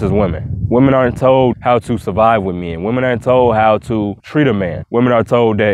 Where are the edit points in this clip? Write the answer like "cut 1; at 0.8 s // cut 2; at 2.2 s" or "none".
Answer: cut 1; at 4.8 s